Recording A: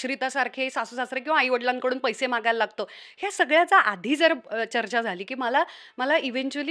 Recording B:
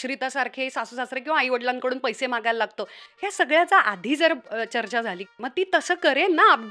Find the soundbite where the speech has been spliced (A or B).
B